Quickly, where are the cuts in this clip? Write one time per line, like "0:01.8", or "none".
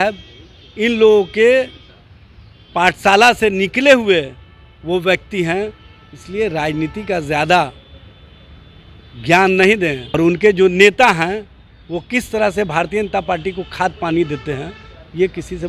0:10.1

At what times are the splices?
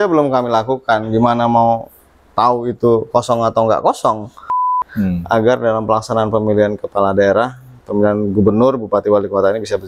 0:04.5

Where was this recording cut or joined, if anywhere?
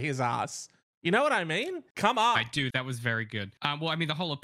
0:01.8
0:02.7
0:03.5

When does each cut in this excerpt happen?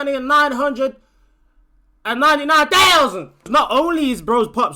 0:03.5

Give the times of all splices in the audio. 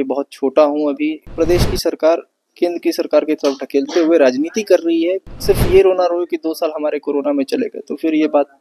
0:01.2
0:05.3

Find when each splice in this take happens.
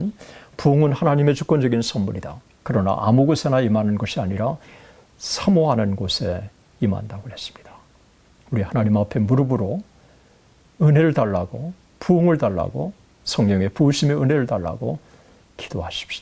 none

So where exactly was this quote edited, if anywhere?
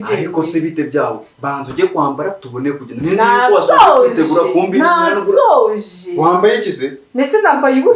none

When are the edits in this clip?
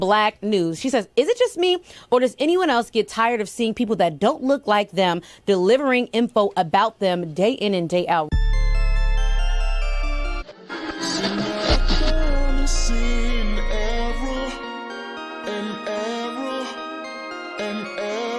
0:16.8

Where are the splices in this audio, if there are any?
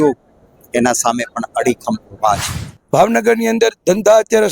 0:02.8

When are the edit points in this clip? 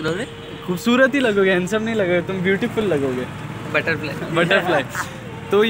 none

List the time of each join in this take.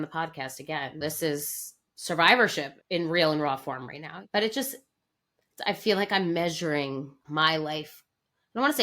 0:00.9

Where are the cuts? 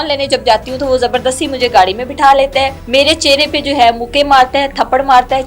0:02.8

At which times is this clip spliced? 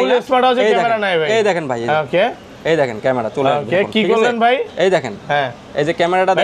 none

